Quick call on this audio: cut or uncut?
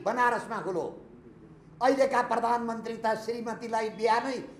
uncut